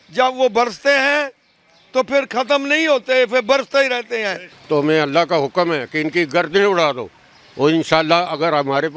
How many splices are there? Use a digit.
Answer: 1